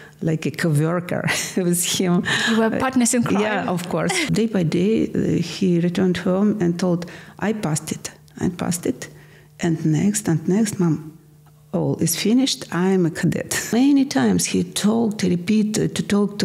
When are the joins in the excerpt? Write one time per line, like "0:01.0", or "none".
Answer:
0:04.3
0:13.7